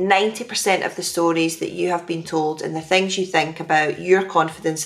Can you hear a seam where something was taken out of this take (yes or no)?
no